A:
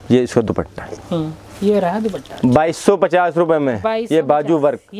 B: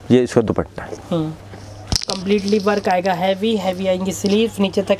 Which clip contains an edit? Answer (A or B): B